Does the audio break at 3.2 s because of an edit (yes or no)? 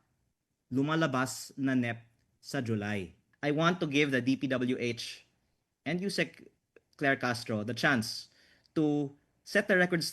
yes